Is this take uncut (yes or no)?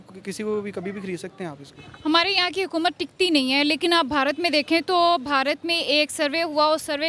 yes